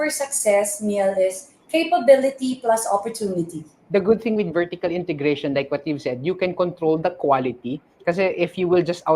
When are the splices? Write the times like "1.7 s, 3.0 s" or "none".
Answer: 3.7 s